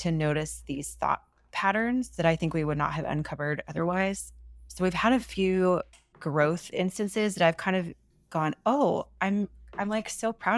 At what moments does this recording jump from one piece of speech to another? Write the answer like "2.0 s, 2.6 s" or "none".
none